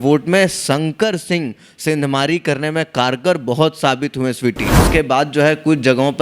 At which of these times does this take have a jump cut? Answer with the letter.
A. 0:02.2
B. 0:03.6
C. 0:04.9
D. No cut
C